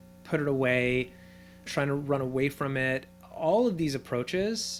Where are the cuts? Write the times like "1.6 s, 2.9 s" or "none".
none